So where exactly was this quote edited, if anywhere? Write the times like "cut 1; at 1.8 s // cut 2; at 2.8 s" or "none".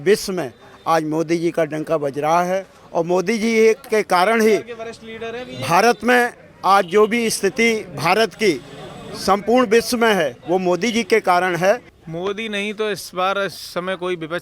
cut 1; at 12.0 s